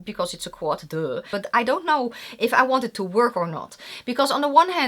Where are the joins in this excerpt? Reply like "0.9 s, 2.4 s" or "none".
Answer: 1.3 s